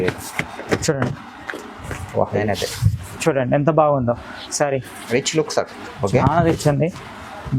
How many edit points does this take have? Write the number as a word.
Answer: one